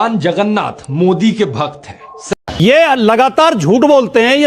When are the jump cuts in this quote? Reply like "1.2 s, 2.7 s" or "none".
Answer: 2.6 s